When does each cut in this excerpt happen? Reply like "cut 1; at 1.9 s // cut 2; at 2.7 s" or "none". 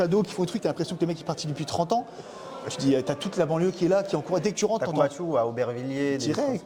none